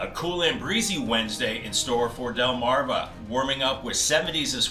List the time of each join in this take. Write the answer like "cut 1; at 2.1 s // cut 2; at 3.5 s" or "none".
none